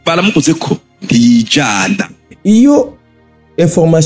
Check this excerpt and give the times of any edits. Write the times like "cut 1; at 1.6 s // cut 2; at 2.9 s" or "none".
cut 1; at 2.2 s

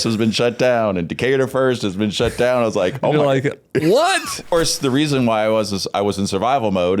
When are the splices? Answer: cut 1; at 4.5 s

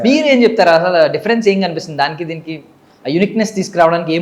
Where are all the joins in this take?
none

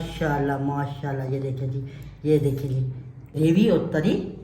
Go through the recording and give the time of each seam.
cut 1; at 3.3 s

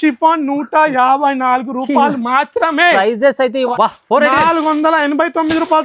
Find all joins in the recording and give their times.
cut 1; at 3.7 s

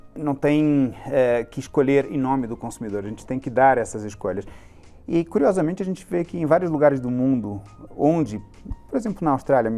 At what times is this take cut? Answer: none

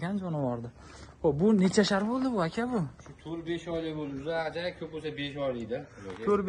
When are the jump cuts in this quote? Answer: none

